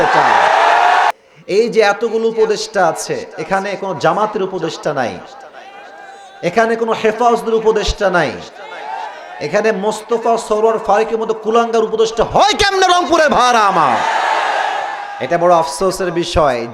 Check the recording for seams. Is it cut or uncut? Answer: cut